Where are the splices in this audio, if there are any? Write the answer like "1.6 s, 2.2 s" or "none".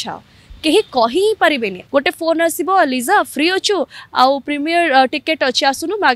1.8 s